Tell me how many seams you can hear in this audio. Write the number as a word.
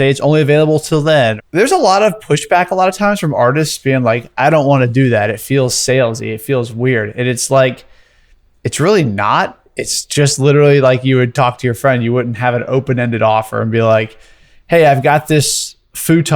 one